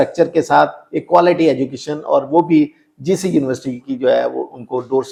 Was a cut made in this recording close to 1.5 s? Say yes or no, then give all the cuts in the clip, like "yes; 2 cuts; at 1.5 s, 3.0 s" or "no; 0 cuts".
no; 0 cuts